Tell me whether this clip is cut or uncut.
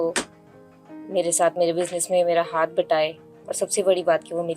uncut